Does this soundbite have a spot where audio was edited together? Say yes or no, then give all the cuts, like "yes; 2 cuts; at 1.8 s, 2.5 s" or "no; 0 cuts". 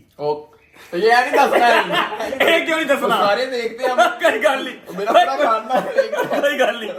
no; 0 cuts